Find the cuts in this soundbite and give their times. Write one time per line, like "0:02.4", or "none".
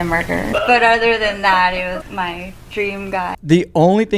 0:02.0
0:03.4